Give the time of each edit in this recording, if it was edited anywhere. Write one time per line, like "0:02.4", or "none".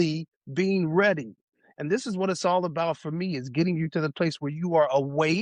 none